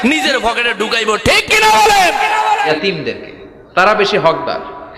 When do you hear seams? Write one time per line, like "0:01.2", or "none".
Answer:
0:02.7

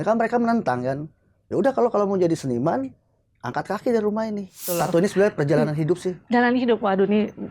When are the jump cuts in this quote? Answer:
0:04.6

